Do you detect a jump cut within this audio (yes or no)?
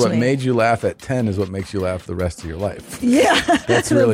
no